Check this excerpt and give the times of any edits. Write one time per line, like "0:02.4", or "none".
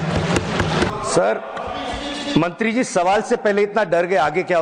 0:00.9